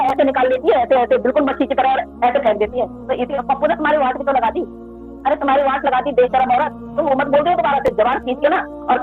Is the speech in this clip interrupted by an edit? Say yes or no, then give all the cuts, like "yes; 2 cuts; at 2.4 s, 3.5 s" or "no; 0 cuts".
yes; 2 cuts; at 3.3 s, 7.1 s